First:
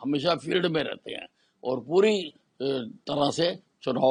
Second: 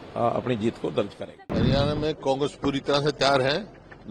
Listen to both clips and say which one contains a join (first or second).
second